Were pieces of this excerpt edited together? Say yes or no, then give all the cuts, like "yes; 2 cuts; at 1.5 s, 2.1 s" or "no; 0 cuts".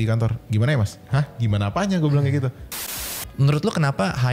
yes; 2 cuts; at 1.0 s, 3.0 s